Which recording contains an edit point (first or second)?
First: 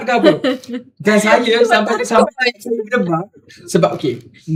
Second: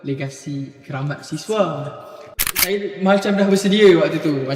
second